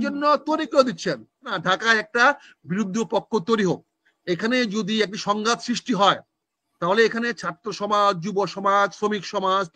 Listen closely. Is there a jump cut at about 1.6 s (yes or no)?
yes